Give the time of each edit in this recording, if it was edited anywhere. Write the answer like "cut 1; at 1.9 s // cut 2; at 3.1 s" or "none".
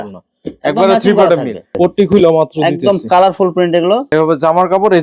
cut 1; at 1.6 s // cut 2; at 4.1 s